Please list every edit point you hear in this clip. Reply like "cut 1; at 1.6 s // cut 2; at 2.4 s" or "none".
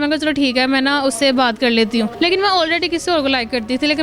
cut 1; at 2.1 s